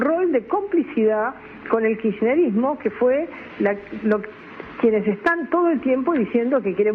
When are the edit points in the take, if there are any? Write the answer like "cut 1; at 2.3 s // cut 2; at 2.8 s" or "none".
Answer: none